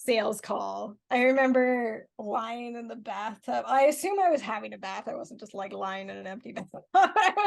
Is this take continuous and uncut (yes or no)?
no